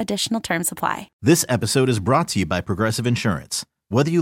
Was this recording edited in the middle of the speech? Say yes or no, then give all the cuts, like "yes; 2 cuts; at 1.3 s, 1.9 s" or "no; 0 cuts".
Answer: yes; 1 cut; at 1.1 s